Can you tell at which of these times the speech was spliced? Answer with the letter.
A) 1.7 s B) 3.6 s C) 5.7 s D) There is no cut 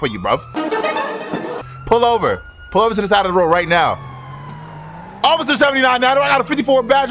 D